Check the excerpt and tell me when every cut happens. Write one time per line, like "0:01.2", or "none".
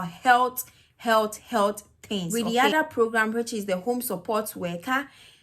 0:02.3